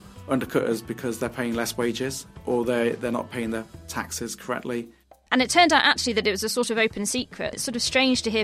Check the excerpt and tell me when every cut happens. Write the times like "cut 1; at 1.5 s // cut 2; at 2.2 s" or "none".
cut 1; at 5.0 s